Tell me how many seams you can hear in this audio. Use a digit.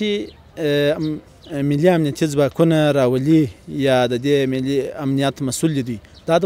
0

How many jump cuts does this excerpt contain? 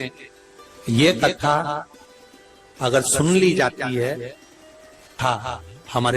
1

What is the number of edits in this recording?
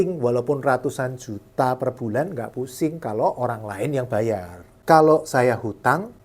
1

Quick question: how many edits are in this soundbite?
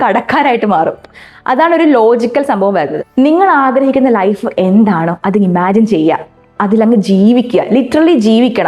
1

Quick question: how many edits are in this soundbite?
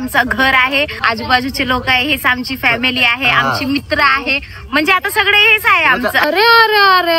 2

